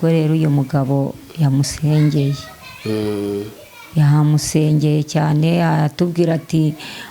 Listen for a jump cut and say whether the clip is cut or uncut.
uncut